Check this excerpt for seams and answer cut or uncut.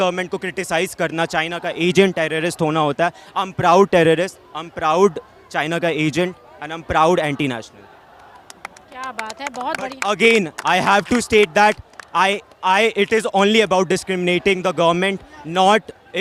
uncut